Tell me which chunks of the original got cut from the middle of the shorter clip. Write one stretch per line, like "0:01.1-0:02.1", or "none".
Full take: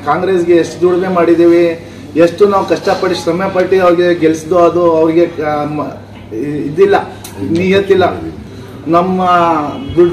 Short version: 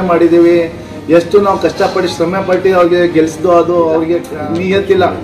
0:05.4-0:07.4